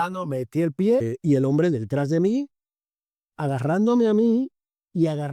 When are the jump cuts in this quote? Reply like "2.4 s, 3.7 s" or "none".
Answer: 1.0 s